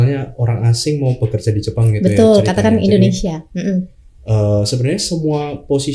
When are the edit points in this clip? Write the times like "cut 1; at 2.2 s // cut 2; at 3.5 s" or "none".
none